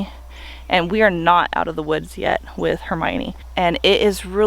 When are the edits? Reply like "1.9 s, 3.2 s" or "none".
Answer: 3.4 s